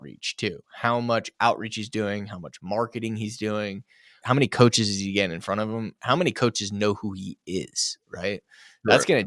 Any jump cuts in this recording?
yes; 1 cut; at 4.2 s

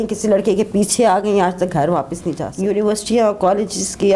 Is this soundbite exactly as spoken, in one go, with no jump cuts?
no; 1 cut; at 2.5 s

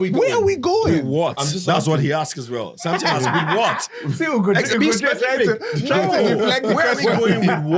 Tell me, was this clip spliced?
no; 0 cuts

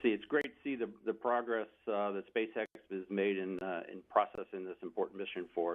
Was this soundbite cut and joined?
yes; 1 cut; at 2.7 s

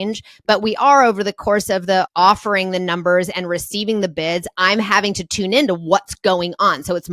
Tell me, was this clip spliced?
yes; 1 cut; at 2.1 s

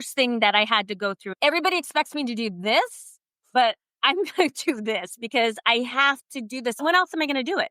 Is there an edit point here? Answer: yes; 2 cuts; at 1.3 s, 6.8 s

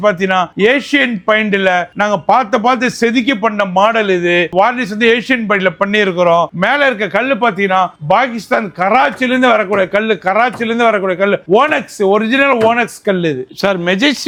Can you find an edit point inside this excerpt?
no; 0 cuts

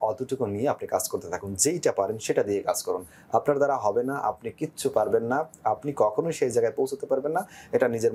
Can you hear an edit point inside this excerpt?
no; 0 cuts

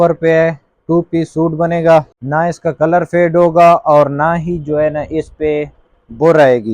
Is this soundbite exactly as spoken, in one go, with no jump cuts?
no; 1 cut; at 2.2 s

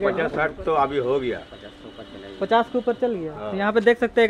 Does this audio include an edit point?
no; 0 cuts

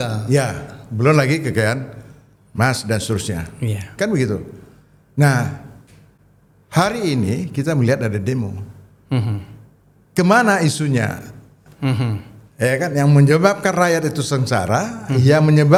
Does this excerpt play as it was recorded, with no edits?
yes; 0 cuts

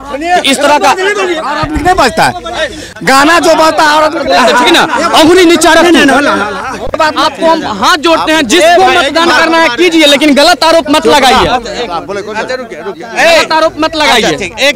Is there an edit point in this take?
no; 0 cuts

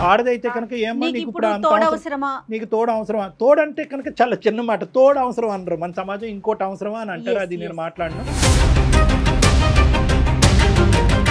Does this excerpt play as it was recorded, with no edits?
yes; 0 cuts

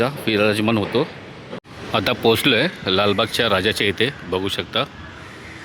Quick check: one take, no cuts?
no; 1 cut; at 1.7 s

